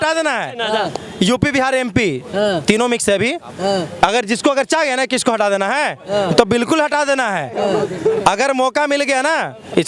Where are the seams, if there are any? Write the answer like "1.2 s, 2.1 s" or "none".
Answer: none